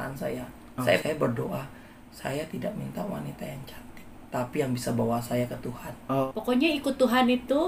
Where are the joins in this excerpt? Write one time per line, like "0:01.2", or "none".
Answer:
0:01.0
0:06.2